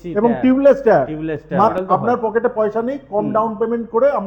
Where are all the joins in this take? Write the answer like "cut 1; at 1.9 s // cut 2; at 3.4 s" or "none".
cut 1; at 1.7 s